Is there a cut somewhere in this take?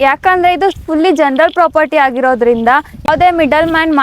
yes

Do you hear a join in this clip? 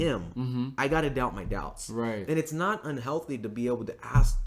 no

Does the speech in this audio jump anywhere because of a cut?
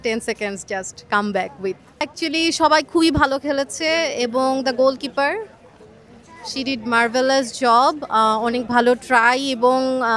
yes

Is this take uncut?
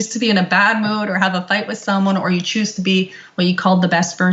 yes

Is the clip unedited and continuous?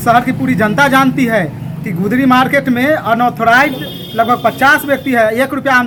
yes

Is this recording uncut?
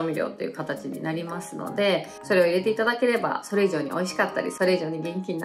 yes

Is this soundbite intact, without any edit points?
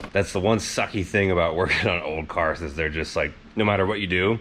yes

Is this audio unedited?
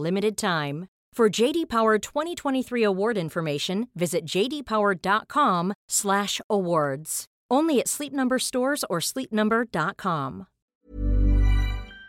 no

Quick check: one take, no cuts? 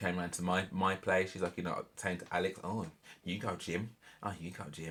yes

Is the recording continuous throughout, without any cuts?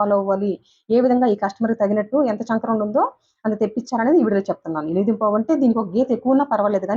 yes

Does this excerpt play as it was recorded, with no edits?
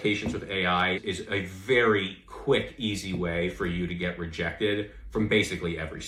yes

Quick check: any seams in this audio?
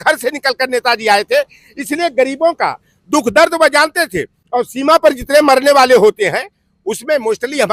no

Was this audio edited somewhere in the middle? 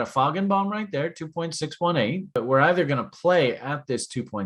yes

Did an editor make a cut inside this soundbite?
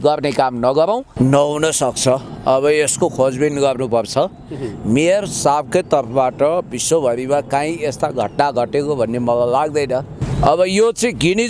yes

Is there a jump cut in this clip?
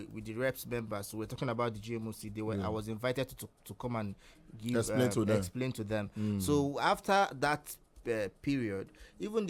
no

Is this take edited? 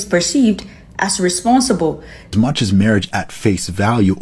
yes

